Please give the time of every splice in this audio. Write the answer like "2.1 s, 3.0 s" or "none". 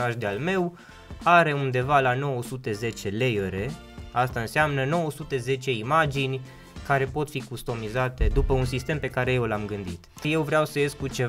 10.2 s